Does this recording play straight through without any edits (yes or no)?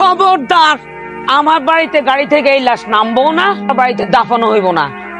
yes